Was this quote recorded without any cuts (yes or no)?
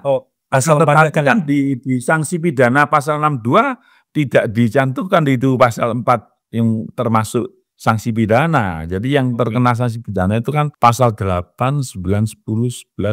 no